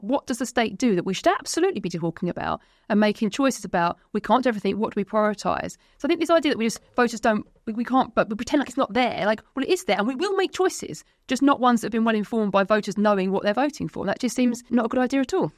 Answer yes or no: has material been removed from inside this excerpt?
yes